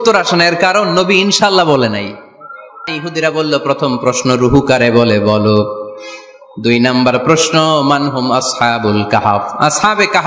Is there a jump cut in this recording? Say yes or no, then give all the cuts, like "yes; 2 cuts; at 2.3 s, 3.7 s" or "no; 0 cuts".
yes; 1 cut; at 2.9 s